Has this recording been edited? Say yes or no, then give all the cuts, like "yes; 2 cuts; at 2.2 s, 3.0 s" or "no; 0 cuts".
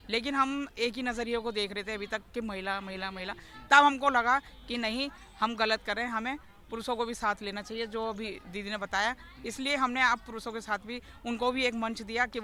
no; 0 cuts